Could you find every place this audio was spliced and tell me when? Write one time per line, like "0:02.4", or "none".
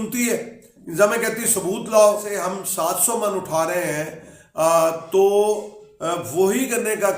0:02.3